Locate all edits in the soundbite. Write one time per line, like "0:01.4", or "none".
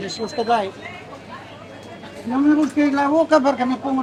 none